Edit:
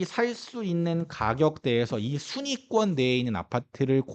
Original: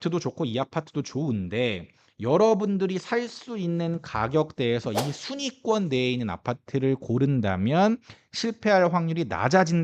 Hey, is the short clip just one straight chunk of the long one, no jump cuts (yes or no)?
yes